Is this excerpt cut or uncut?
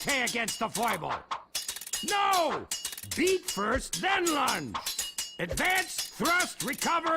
cut